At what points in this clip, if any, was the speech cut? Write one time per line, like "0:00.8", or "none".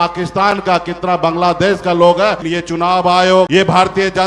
0:02.4
0:03.5